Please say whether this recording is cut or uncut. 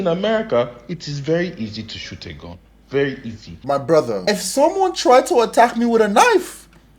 cut